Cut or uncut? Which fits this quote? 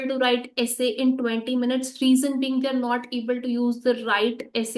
uncut